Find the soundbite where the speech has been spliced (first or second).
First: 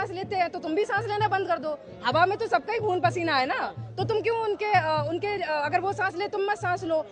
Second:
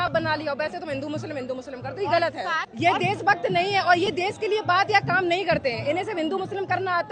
second